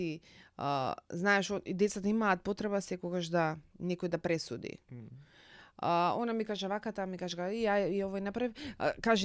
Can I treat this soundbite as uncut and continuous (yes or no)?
yes